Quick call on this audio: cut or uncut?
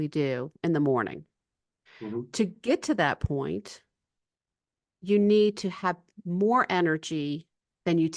uncut